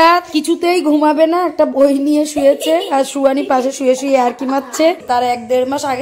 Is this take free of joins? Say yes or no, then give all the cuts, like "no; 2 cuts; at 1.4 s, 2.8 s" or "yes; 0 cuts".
no; 1 cut; at 5.0 s